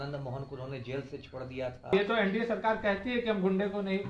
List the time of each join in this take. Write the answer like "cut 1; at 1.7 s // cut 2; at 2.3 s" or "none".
cut 1; at 1.9 s